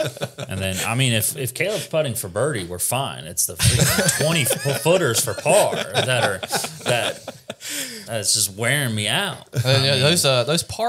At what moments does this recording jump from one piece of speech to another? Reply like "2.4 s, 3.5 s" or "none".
none